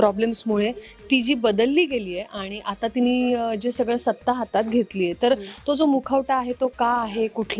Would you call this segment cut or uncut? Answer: uncut